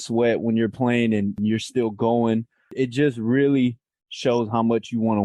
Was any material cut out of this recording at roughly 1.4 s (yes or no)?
yes